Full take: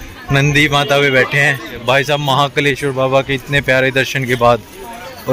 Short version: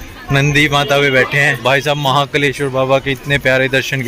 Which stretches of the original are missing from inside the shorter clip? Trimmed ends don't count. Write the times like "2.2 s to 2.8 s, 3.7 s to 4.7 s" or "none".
1.5 s to 1.7 s